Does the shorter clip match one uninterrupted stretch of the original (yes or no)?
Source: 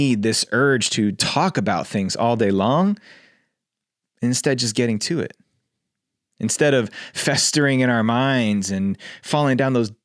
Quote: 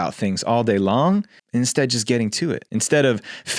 no